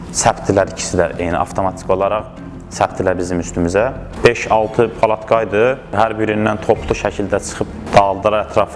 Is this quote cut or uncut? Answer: cut